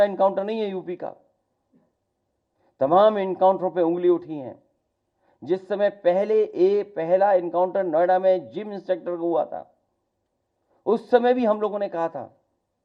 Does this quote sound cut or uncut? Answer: uncut